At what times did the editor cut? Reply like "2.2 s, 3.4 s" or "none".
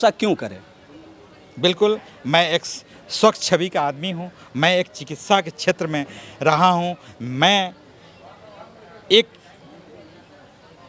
none